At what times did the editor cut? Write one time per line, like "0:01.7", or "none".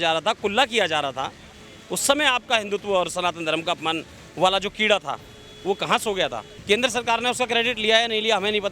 0:06.5